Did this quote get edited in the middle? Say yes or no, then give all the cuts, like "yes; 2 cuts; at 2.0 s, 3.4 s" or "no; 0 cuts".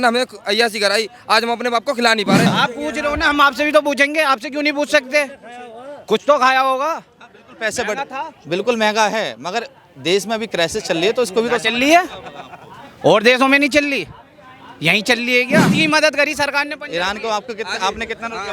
yes; 2 cuts; at 2.5 s, 15.7 s